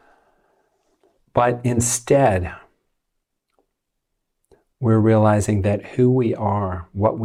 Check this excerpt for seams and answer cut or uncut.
uncut